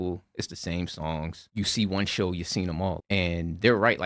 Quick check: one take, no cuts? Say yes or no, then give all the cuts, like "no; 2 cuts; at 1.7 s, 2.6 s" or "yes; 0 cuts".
no; 2 cuts; at 1.4 s, 3.0 s